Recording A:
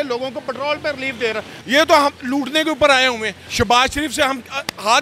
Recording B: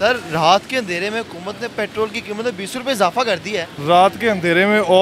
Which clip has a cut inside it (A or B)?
A